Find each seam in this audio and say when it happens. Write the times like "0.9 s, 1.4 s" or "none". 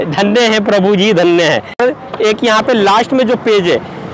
1.8 s